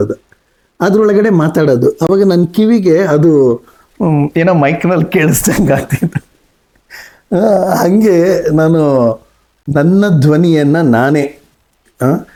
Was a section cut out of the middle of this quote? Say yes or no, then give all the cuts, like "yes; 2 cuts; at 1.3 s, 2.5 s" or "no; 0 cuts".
no; 0 cuts